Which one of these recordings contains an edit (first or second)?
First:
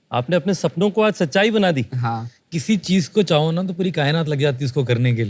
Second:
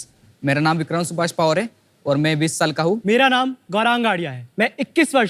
second